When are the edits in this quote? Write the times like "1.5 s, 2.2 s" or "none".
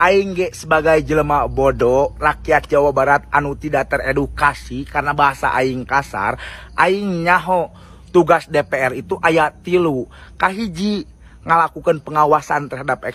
none